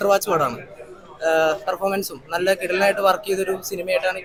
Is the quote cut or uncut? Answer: uncut